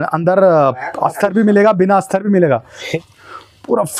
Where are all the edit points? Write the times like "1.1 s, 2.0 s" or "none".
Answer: 2.8 s